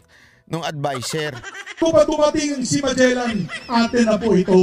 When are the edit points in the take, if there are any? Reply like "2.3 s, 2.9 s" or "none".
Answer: 1.8 s